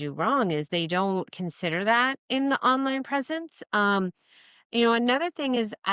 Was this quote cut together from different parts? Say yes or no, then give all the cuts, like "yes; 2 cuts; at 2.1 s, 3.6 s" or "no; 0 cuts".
no; 0 cuts